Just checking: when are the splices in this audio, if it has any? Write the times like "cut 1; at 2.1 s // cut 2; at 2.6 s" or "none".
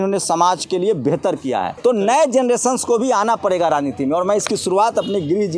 cut 1; at 1.7 s